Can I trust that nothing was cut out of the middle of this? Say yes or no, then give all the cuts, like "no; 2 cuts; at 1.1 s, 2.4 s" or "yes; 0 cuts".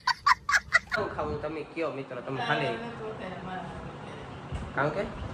no; 1 cut; at 1.0 s